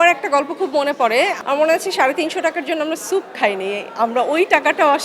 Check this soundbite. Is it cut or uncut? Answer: cut